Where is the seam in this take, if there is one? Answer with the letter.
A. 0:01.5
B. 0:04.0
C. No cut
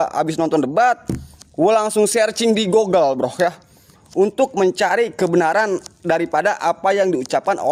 C